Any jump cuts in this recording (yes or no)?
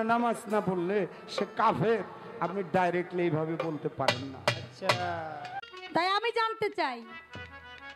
yes